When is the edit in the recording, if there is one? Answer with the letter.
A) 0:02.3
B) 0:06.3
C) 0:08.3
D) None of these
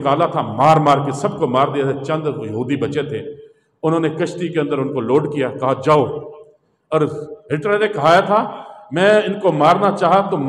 D